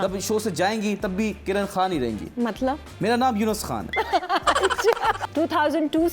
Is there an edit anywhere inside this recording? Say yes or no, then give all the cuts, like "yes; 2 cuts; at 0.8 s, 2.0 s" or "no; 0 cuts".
yes; 3 cuts; at 2.2 s, 3.8 s, 5.2 s